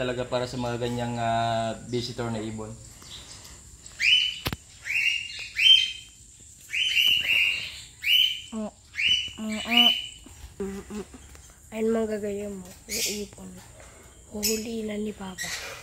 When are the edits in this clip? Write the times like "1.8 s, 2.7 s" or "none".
none